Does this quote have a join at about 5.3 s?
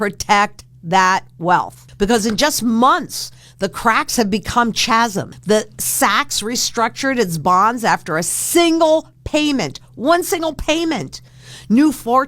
yes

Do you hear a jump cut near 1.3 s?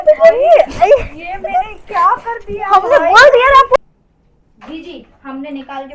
no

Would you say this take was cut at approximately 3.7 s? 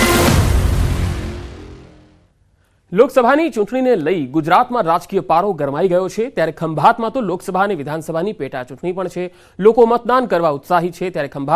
yes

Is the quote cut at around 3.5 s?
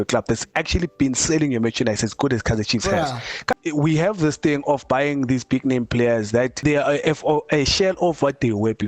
yes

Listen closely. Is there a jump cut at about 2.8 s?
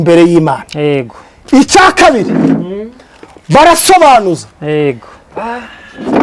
no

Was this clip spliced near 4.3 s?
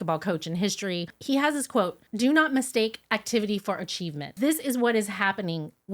yes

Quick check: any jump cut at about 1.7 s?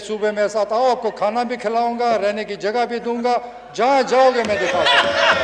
no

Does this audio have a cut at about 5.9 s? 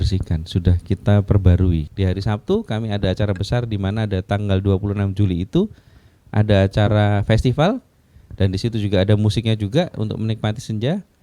no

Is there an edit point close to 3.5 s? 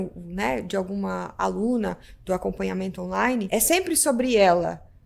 yes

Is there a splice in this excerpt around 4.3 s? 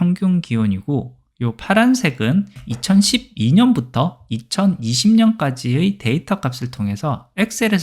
no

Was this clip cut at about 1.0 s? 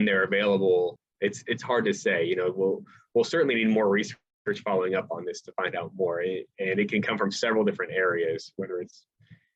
yes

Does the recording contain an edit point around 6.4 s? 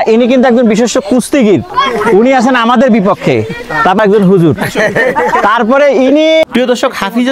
yes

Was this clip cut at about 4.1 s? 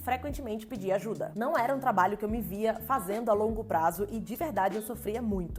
no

